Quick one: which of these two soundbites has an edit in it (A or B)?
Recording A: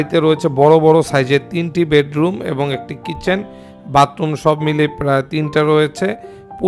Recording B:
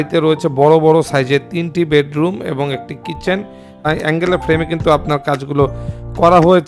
B